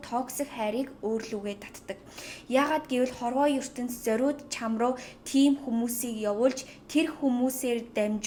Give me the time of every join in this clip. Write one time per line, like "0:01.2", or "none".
none